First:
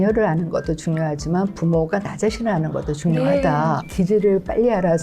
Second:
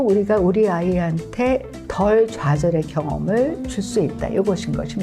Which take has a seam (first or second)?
first